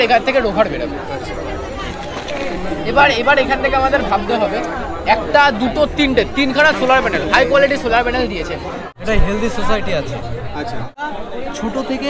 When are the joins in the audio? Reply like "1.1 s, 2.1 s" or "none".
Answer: 8.9 s, 11.0 s

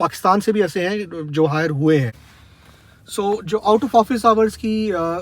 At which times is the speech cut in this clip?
2.7 s

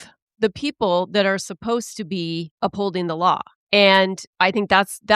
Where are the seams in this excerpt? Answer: 2.5 s, 3.5 s, 4.2 s

